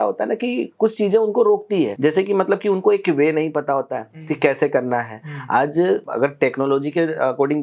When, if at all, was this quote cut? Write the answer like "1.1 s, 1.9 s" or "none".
1.9 s, 6.1 s